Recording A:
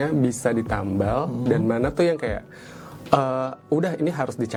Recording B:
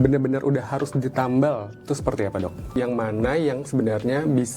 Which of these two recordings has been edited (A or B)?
B